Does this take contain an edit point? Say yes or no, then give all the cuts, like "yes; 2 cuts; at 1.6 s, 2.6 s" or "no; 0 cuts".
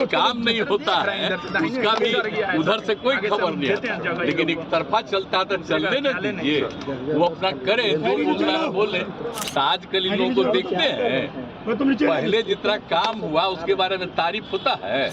yes; 1 cut; at 9.4 s